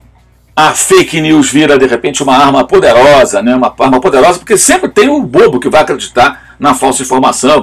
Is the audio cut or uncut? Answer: uncut